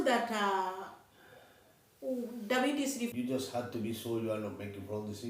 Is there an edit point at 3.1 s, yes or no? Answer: yes